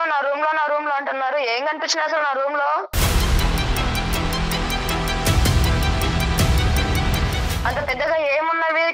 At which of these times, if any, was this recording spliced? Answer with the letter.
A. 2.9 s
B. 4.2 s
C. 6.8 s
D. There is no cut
A